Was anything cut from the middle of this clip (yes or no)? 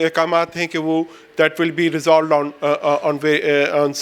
no